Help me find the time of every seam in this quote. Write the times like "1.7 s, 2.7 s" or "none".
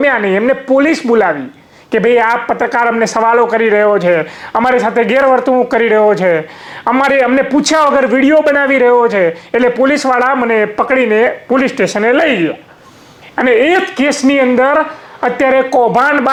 none